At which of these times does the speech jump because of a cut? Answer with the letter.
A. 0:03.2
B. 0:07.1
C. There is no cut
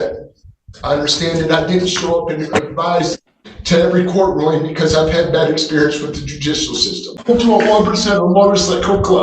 B